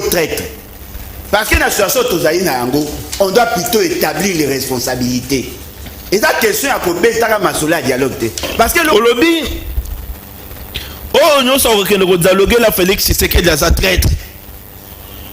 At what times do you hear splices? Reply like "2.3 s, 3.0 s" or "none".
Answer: 8.9 s